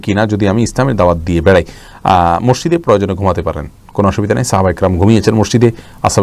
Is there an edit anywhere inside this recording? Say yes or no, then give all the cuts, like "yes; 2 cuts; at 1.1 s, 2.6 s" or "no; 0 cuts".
no; 0 cuts